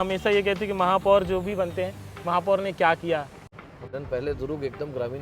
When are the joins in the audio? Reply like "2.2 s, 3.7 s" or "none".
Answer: 3.5 s

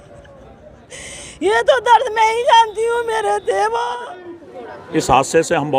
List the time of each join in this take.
3.8 s

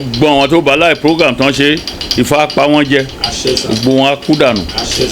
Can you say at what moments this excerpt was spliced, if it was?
none

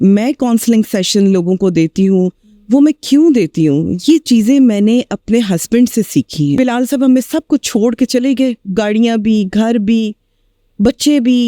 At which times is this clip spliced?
6.6 s

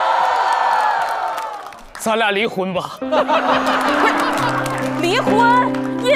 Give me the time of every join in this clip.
none

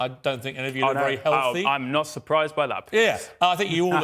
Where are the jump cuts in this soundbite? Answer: none

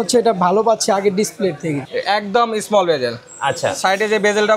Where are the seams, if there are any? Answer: 1.8 s

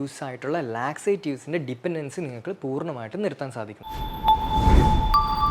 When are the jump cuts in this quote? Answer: 3.9 s

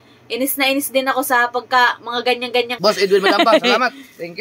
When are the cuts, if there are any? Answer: 2.7 s

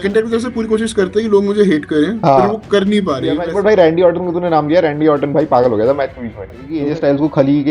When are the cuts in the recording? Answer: 3.4 s, 6.7 s

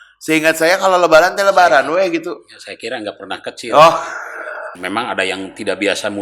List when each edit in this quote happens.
4.7 s

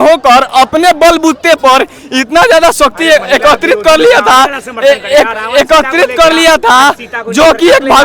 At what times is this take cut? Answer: none

